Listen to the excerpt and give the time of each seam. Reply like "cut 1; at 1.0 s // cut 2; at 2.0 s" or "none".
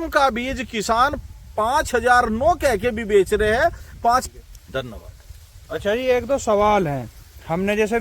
cut 1; at 4.2 s